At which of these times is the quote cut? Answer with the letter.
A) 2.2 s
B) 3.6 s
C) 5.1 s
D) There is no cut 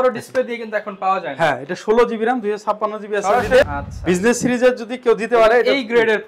B